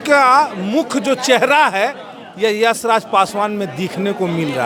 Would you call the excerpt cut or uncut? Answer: uncut